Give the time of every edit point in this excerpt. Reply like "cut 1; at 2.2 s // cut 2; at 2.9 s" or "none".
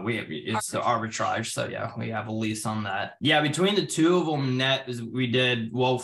cut 1; at 3.1 s